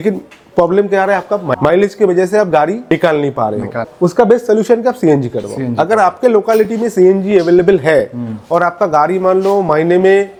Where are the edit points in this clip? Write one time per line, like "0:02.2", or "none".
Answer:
none